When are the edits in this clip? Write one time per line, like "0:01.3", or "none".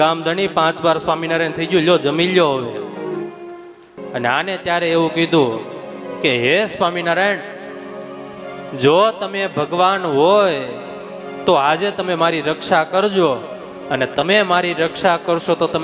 0:03.9